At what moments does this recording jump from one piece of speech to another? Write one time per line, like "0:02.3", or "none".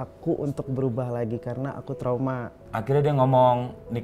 0:02.6